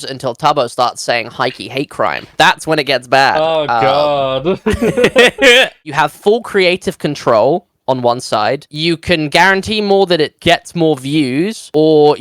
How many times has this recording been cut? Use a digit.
1